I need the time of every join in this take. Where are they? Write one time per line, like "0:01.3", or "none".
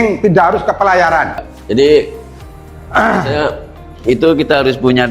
0:01.5